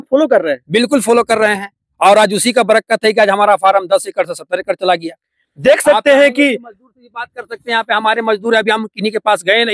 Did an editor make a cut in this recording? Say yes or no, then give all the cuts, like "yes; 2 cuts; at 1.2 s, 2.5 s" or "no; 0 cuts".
no; 0 cuts